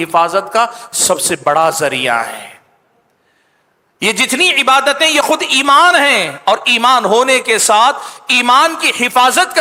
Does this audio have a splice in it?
no; 0 cuts

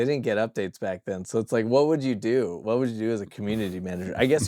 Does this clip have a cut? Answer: no; 0 cuts

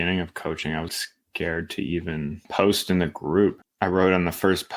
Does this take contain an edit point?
yes; 3 cuts; at 0.9 s, 2.4 s, 3.7 s

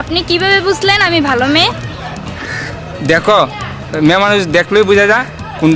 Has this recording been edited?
no; 0 cuts

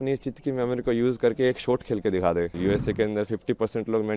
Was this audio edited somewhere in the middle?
yes; 1 cut; at 2.5 s

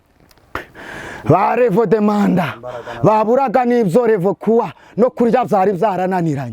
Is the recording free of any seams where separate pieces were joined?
yes; 0 cuts

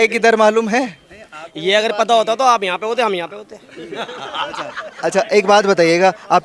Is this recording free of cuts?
yes; 0 cuts

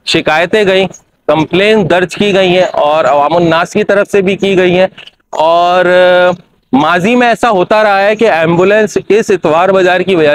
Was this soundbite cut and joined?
no; 0 cuts

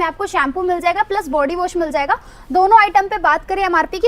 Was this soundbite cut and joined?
no; 0 cuts

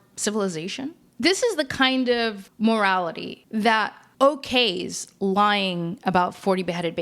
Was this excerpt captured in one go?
no; 3 cuts; at 1.1 s, 2.4 s, 4.0 s

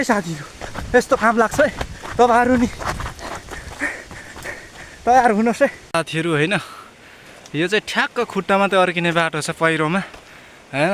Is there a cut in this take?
yes; 1 cut; at 5.8 s

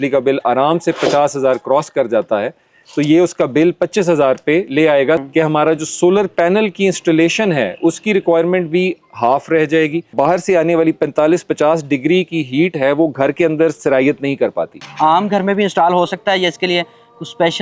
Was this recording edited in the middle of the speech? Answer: yes; 3 cuts; at 5.2 s, 10.1 s, 14.8 s

